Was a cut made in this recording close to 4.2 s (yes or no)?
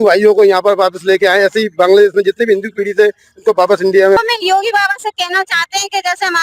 yes